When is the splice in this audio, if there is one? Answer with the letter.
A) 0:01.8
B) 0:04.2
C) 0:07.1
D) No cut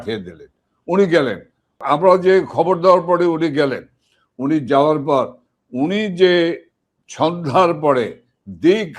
A